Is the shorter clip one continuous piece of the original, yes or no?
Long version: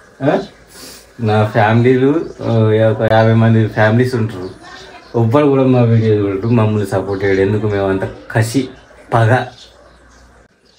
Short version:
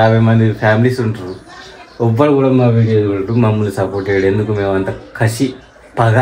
yes